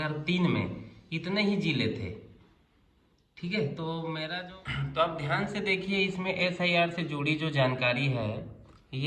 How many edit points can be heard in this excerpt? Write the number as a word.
one